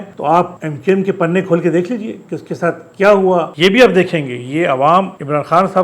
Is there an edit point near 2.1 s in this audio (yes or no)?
no